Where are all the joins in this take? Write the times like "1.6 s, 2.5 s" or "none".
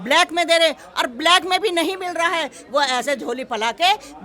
none